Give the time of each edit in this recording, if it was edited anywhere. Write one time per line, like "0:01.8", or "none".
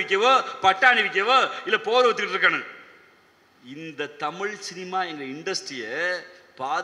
none